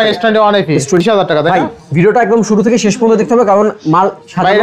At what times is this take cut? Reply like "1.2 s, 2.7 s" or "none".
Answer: 1.0 s